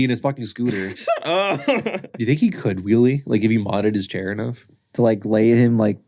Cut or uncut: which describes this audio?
cut